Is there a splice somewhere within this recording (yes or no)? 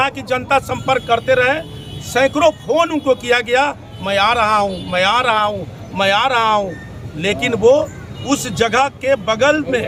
no